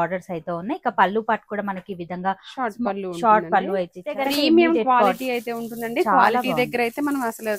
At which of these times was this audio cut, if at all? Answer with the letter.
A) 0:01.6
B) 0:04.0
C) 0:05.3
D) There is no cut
B